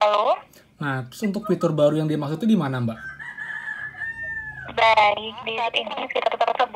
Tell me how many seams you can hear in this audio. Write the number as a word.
one